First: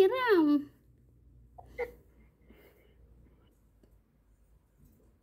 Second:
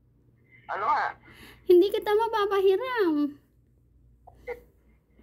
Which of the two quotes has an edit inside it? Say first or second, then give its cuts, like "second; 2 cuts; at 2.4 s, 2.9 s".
first; 1 cut; at 3.5 s